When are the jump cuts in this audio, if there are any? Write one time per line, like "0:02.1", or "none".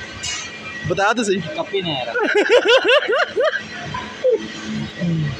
0:03.0